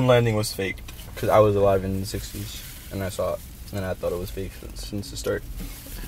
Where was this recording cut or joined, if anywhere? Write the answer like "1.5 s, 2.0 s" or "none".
1.1 s